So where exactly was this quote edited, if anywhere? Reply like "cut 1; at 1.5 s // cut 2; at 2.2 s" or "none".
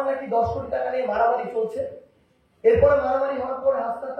none